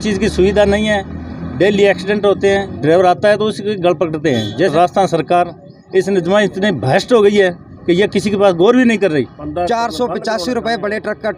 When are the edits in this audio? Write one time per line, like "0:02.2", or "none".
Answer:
0:02.7
0:04.7
0:09.4